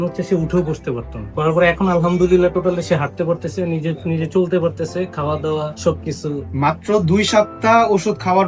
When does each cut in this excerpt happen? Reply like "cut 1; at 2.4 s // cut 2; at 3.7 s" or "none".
cut 1; at 1.3 s